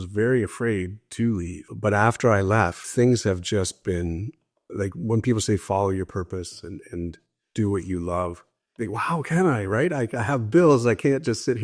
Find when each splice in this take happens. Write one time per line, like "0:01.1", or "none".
0:01.7
0:02.8

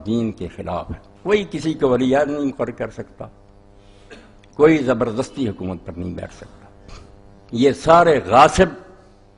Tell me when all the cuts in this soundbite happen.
0:02.4

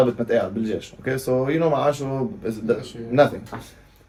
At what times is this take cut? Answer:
none

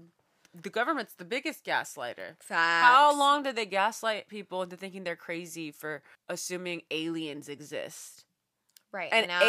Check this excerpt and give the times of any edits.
0:06.1

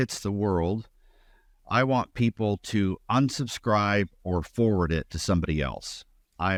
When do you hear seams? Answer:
none

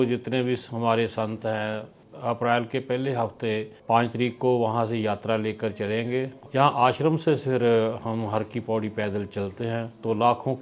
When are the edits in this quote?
0:02.0
0:03.7
0:06.4

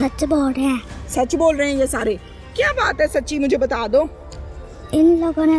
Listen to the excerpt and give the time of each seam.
none

